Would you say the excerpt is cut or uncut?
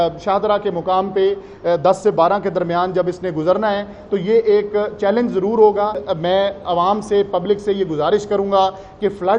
cut